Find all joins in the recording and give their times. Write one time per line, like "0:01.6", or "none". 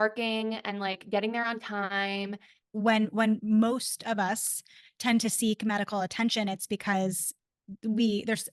0:02.5